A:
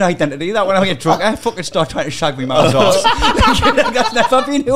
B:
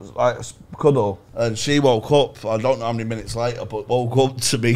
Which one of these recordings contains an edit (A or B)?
B